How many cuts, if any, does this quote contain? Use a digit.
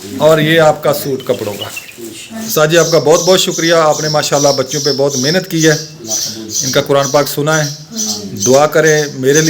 1